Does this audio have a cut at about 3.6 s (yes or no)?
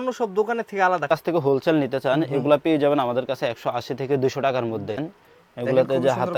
no